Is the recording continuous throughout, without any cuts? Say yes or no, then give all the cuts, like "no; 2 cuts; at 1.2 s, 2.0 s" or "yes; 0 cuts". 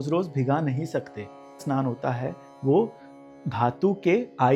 no; 1 cut; at 1.6 s